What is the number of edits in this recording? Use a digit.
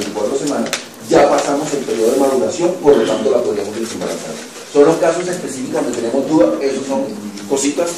1